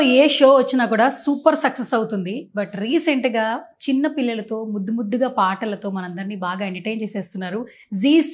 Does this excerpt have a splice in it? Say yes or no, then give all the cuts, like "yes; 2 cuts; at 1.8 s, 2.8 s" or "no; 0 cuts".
no; 0 cuts